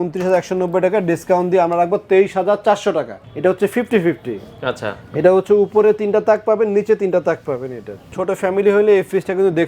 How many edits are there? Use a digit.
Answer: 2